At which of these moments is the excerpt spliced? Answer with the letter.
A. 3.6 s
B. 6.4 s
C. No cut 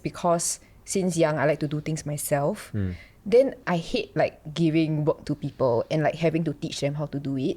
A